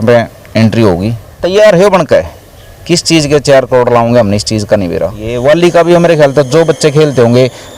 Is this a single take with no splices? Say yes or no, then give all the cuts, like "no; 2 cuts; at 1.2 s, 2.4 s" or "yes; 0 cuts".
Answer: no; 2 cuts; at 1.3 s, 5.3 s